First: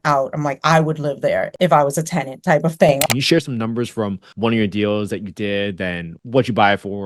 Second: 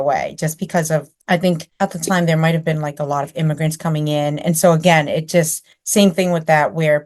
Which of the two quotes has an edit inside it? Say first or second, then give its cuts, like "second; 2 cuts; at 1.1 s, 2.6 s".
first; 4 cuts; at 1.5 s, 3.0 s, 4.2 s, 6.1 s